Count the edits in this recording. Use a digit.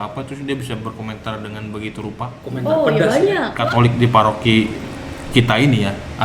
1